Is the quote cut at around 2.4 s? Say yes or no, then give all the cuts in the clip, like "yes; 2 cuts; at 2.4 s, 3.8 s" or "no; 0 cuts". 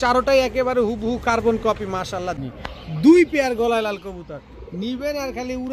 yes; 1 cut; at 2.4 s